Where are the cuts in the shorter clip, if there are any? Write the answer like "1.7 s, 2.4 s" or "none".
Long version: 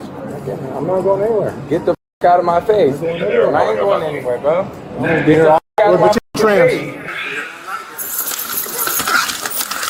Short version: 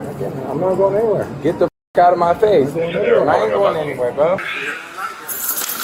4.6 s